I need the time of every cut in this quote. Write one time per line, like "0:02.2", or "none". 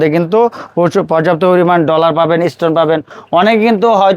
none